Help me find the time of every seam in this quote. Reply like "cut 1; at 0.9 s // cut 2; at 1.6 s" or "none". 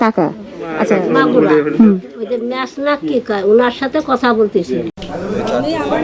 cut 1; at 5.0 s